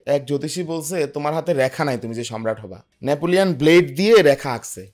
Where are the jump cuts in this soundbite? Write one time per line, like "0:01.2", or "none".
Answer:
none